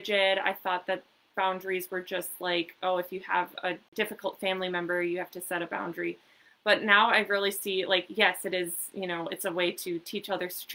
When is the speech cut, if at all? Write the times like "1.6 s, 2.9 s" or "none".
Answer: 3.9 s